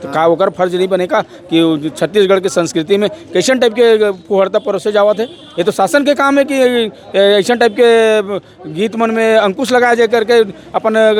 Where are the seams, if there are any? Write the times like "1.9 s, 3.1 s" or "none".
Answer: none